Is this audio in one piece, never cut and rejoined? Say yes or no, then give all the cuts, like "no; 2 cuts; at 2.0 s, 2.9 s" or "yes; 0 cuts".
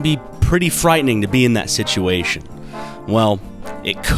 yes; 0 cuts